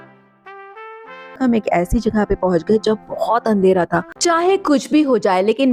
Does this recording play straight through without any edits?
no; 2 cuts; at 1.4 s, 4.1 s

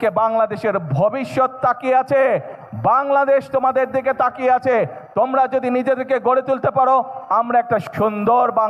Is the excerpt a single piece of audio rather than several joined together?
yes; 0 cuts

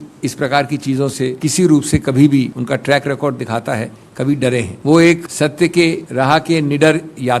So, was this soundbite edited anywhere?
yes; 4 cuts; at 1.4 s, 2.6 s, 4.7 s, 5.7 s

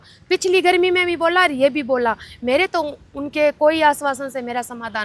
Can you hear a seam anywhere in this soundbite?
no; 0 cuts

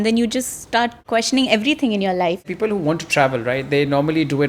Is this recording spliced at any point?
yes; 2 cuts; at 1.0 s, 2.4 s

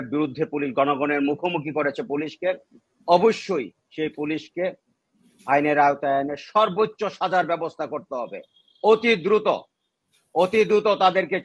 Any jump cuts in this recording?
no; 0 cuts

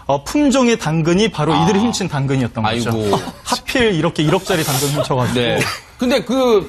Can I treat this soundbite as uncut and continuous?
no; 1 cut; at 5.1 s

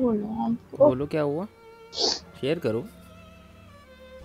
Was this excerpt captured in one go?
yes; 0 cuts

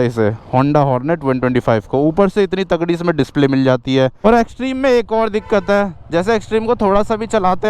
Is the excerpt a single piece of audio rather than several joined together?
no; 1 cut; at 4.2 s

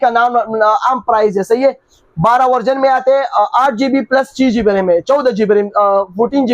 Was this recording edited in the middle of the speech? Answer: no; 0 cuts

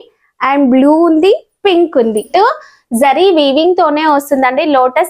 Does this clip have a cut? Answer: yes; 1 cut; at 2.3 s

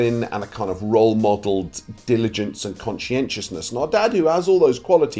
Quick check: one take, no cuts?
yes; 0 cuts

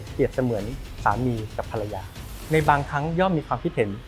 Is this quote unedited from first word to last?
yes; 0 cuts

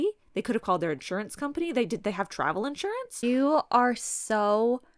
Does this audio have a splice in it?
yes; 1 cut; at 3.2 s

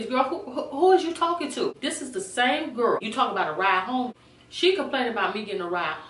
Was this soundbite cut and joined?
yes; 3 cuts; at 1.8 s, 3.1 s, 4.2 s

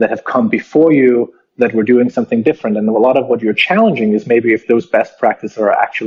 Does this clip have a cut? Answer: no; 0 cuts

